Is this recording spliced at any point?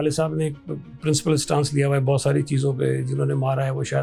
no; 0 cuts

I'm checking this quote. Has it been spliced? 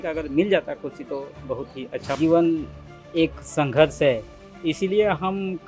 yes; 1 cut; at 2.0 s

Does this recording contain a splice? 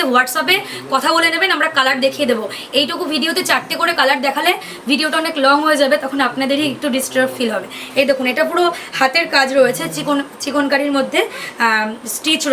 no; 0 cuts

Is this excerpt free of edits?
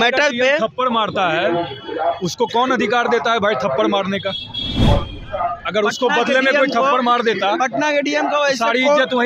yes; 0 cuts

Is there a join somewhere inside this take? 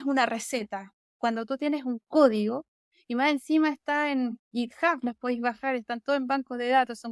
no; 0 cuts

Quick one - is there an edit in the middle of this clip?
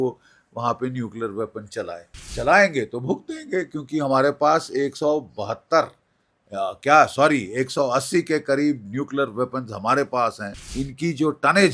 yes; 2 cuts; at 2.2 s, 10.7 s

